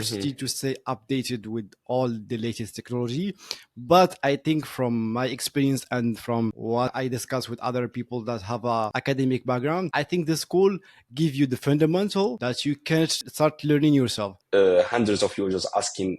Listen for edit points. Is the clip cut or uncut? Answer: cut